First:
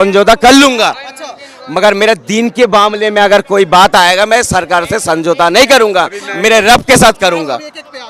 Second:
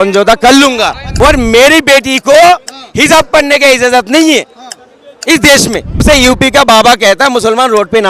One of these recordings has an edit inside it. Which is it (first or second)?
second